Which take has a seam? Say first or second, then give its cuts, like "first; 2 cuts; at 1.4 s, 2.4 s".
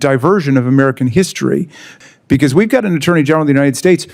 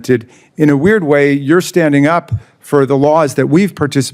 first; 1 cut; at 1.9 s